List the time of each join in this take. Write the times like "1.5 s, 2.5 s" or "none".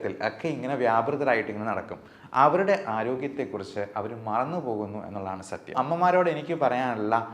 5.7 s